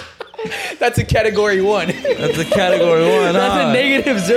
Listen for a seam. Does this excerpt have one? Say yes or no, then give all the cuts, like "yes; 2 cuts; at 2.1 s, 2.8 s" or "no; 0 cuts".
no; 0 cuts